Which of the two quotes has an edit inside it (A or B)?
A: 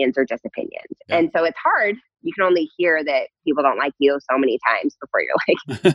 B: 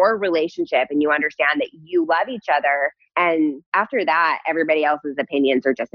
B